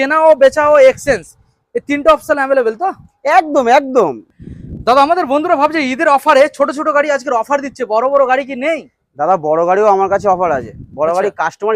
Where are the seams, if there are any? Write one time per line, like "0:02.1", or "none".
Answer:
0:04.3